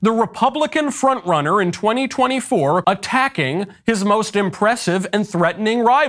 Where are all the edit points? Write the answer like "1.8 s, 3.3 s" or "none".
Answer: 2.8 s